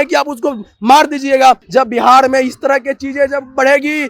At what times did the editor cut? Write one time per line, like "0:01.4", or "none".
0:01.6

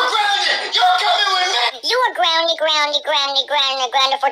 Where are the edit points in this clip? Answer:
0:01.9

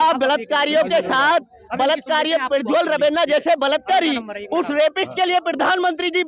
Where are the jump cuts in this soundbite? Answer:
none

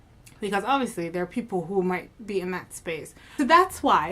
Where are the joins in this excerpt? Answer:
0:03.2

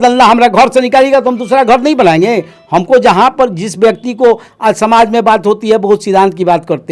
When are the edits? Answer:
none

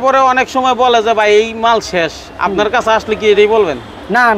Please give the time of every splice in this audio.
none

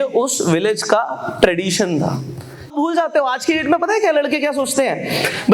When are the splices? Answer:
0:02.7

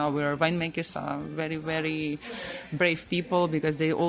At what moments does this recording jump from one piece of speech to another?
none

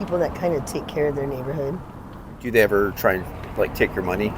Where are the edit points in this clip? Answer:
0:02.4

